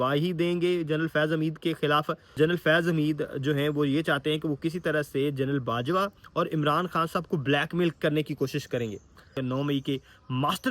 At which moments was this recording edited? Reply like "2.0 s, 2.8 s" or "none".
2.3 s, 9.3 s